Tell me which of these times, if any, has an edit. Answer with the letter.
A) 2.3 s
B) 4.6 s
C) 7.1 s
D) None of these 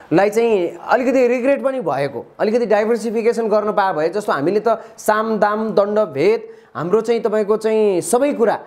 D